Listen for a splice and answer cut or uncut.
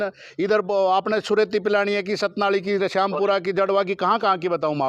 uncut